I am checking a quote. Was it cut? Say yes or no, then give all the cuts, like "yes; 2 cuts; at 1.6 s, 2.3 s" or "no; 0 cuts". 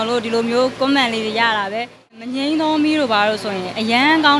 yes; 1 cut; at 2.3 s